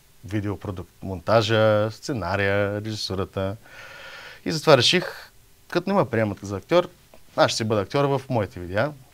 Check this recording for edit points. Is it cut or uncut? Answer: uncut